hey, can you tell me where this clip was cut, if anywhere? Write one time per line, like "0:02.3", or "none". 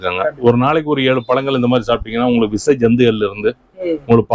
none

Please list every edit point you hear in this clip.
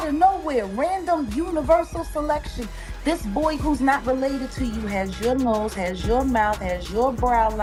none

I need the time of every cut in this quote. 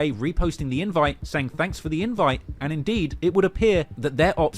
none

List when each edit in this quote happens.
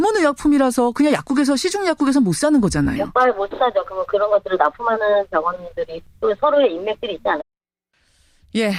none

